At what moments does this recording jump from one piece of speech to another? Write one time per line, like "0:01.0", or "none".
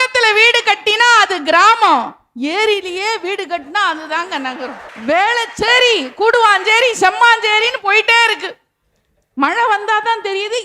0:04.9